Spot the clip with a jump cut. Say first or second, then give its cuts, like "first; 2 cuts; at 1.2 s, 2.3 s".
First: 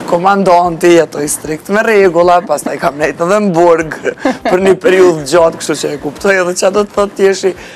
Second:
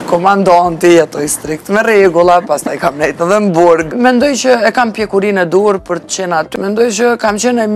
second; 2 cuts; at 3.9 s, 6.5 s